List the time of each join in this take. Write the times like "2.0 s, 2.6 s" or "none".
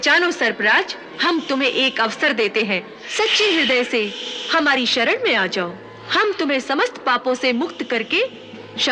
1.1 s, 3.0 s